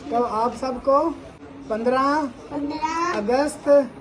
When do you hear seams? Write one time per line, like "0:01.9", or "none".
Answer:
0:01.5